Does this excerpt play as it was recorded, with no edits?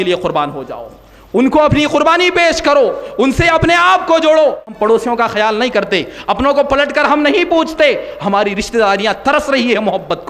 no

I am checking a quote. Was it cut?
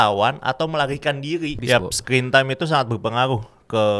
yes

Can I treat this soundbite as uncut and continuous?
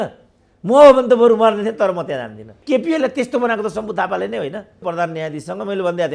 no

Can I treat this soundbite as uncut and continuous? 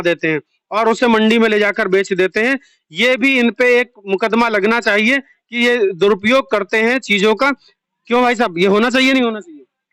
yes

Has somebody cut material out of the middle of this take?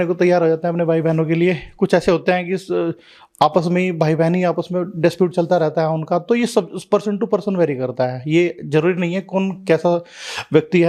no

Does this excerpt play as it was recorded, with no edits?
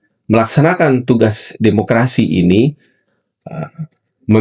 yes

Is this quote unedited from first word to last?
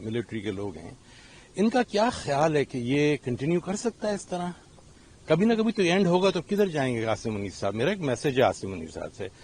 yes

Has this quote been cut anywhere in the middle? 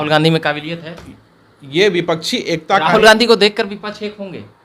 no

